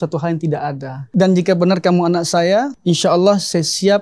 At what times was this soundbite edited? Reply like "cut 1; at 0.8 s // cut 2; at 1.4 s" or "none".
cut 1; at 0.9 s // cut 2; at 2.7 s